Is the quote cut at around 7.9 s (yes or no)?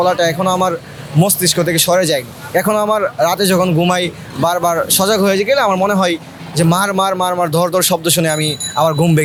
no